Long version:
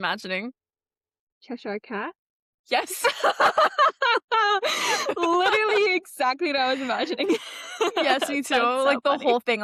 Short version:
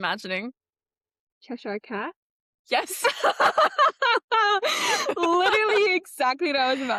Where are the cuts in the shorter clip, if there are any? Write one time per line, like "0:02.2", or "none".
none

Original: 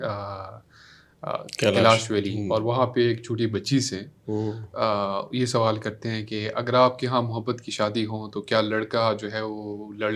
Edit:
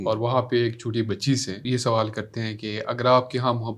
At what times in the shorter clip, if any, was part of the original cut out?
0:01.6

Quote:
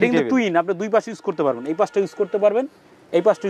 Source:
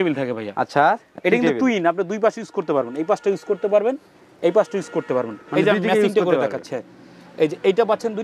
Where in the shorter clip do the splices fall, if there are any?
none

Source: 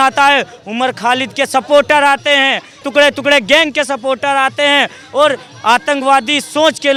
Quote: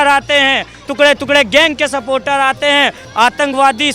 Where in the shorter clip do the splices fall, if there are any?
0:03.0

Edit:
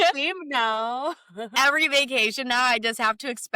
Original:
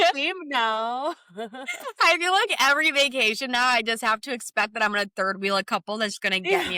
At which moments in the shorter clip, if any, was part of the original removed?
0:01.5

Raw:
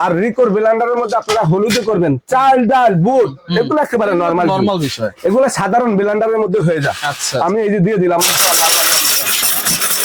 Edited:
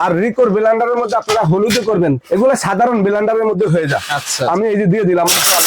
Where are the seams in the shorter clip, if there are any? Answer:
0:02.2

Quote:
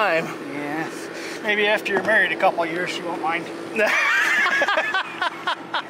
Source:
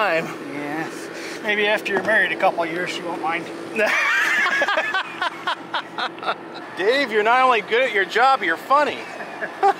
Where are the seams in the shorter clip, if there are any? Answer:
none

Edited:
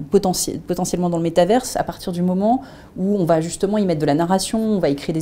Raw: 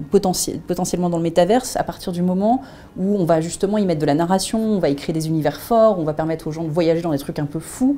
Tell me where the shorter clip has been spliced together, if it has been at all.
none

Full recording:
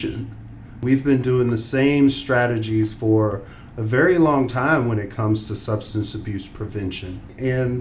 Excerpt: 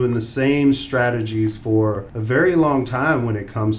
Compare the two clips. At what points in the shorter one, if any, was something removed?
0:02.1

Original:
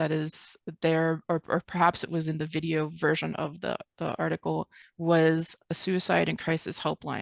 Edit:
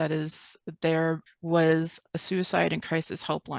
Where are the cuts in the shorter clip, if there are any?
0:01.2

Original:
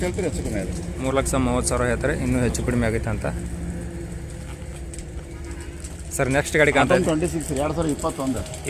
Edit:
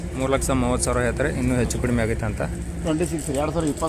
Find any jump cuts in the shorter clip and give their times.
0:02.9

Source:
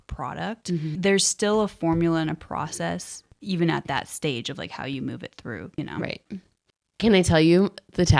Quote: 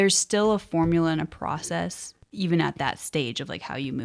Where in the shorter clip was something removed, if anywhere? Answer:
none

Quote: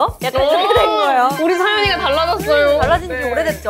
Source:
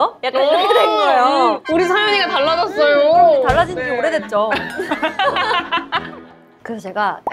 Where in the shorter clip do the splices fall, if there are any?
0:01.3
0:02.8

